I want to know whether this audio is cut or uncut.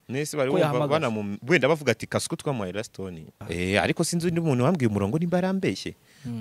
cut